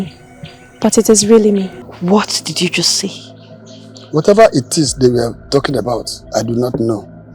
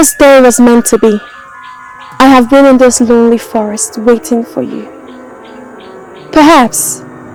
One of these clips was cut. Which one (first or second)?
first